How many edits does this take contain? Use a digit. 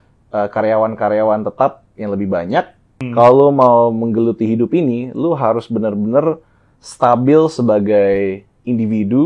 1